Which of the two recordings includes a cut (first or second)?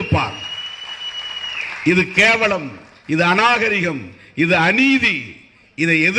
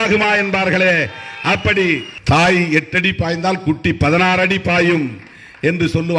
second